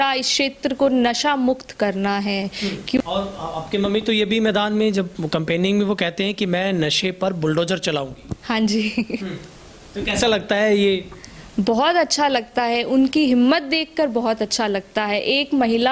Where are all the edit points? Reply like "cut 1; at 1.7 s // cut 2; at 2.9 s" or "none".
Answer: cut 1; at 3.0 s